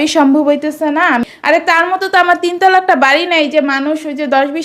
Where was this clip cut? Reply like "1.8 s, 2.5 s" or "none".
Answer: 1.0 s